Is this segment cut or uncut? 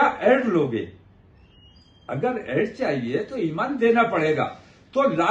uncut